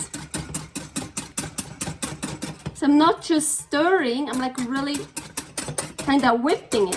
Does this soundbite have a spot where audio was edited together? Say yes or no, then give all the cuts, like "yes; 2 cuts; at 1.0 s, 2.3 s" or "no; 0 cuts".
yes; 1 cut; at 5.5 s